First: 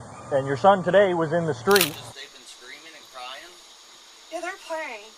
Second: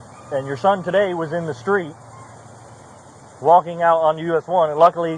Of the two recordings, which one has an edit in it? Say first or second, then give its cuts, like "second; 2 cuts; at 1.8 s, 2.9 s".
first; 1 cut; at 2.1 s